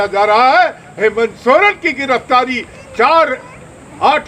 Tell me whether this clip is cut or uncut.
uncut